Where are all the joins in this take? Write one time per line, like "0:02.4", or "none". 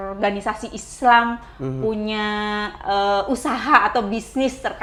none